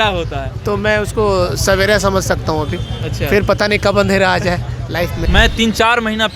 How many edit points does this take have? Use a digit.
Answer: 1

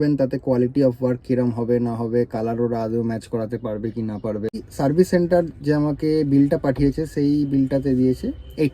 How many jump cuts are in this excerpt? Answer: 1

